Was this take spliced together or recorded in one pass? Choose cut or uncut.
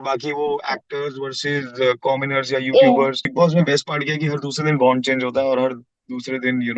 cut